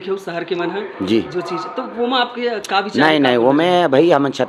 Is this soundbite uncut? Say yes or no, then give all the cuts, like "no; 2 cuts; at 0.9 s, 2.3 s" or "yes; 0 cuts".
yes; 0 cuts